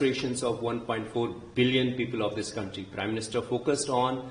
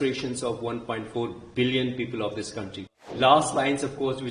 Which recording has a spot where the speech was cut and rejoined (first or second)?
second